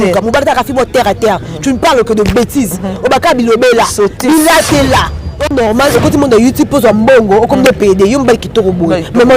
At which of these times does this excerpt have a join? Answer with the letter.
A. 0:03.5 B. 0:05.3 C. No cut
B